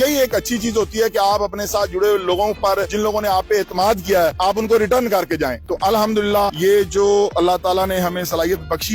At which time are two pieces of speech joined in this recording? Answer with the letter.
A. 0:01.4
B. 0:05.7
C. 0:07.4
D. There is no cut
D